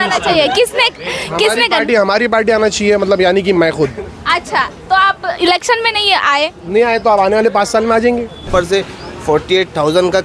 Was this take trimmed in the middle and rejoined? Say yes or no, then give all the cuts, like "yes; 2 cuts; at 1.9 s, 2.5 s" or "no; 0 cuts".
yes; 1 cut; at 8.5 s